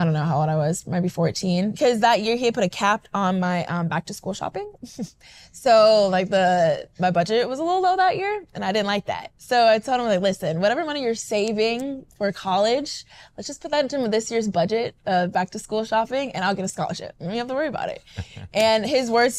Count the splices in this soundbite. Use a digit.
1